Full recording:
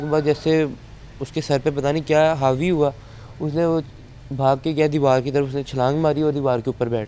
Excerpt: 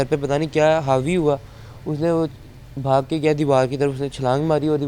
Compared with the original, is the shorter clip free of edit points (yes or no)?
yes